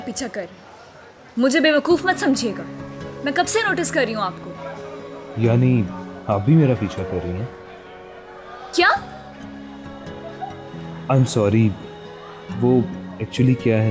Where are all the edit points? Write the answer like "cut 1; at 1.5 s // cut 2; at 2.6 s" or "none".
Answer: none